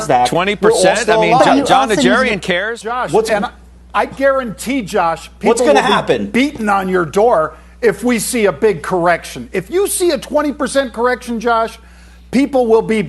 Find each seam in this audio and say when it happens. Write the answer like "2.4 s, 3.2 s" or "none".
2.8 s